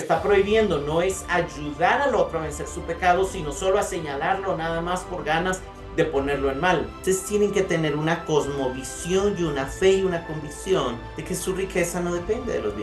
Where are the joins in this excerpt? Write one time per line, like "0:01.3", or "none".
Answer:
0:06.9
0:11.1